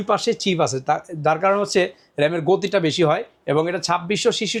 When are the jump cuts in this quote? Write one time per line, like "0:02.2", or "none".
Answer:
none